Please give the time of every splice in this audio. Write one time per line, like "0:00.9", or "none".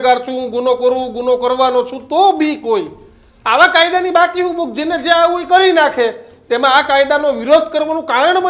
none

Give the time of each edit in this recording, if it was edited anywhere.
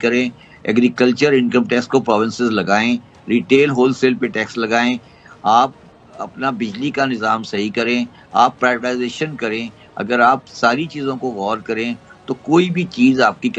none

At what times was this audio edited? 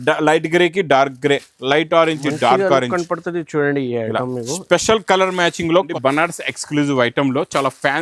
0:05.9

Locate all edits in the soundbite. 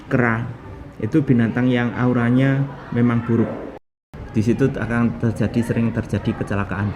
0:03.8

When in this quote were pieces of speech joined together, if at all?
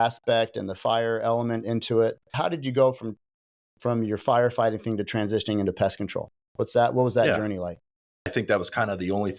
0:02.3
0:08.3

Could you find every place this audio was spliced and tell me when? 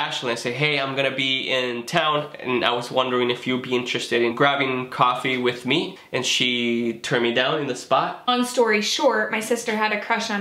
0:04.3
0:06.0
0:08.3

